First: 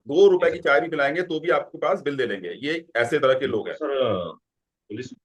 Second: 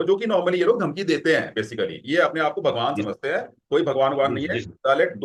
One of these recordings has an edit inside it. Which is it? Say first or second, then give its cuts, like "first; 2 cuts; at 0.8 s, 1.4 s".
first; 1 cut; at 3.7 s